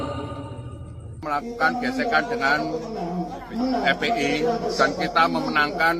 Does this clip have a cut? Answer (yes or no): yes